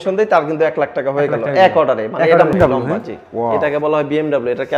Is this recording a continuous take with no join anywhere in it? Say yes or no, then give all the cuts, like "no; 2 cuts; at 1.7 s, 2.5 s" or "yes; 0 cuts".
no; 1 cut; at 2.5 s